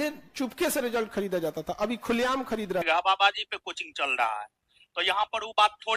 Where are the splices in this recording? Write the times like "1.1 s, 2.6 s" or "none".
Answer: 2.8 s